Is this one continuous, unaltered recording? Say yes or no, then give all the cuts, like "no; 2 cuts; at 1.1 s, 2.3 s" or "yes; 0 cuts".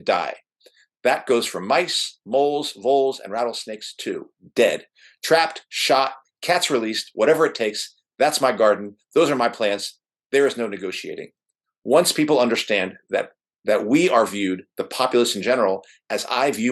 yes; 0 cuts